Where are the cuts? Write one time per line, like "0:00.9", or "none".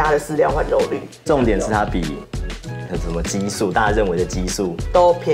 0:01.1